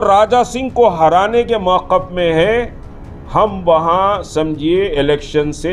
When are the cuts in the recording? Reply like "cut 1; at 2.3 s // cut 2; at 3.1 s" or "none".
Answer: none